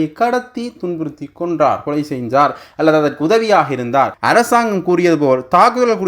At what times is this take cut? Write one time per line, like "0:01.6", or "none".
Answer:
0:04.2